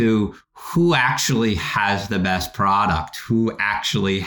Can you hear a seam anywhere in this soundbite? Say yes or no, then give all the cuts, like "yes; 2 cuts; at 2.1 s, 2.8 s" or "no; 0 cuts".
no; 0 cuts